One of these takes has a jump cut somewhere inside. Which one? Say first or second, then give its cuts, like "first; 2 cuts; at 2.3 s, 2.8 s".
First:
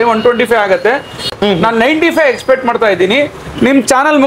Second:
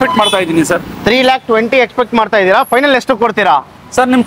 first; 1 cut; at 1.2 s